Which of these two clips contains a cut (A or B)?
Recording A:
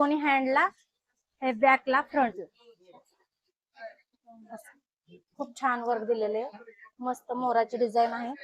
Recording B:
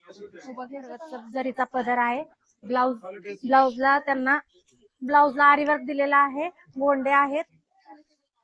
B